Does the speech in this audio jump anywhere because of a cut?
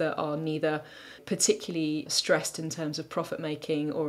yes; 2 cuts; at 1.2 s, 2.1 s

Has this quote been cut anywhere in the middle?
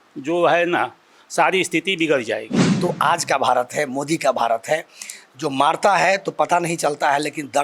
yes; 1 cut; at 2.6 s

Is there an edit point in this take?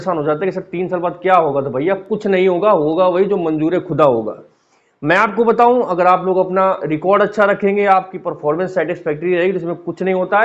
no; 0 cuts

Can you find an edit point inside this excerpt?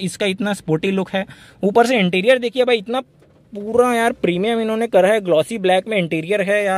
no; 0 cuts

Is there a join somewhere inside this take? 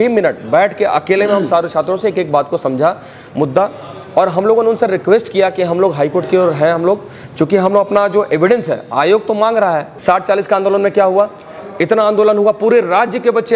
yes; 1 cut; at 9.9 s

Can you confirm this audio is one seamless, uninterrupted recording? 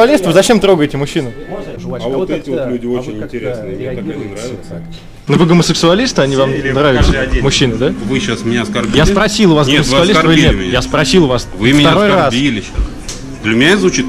no; 2 cuts; at 1.7 s, 5.1 s

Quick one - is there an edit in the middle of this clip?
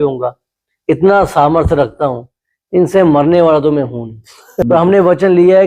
yes; 1 cut; at 4.6 s

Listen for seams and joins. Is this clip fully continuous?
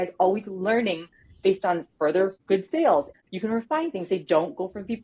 no; 2 cuts; at 2.4 s, 3.1 s

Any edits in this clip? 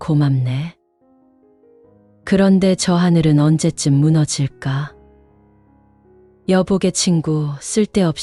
no; 0 cuts

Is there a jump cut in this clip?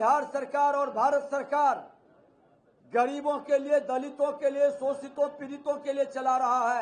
no; 0 cuts

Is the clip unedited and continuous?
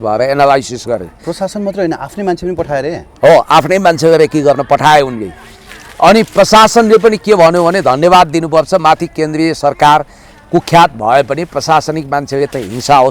yes; 0 cuts

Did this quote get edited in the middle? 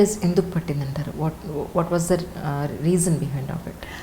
no; 0 cuts

